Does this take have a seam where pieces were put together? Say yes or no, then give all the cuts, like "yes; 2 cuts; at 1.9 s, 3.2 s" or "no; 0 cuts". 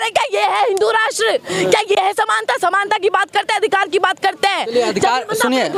no; 0 cuts